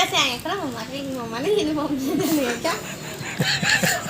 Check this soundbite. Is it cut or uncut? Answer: uncut